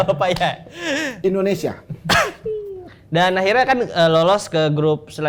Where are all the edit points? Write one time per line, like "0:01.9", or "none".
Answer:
none